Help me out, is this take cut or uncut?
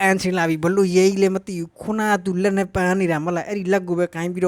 uncut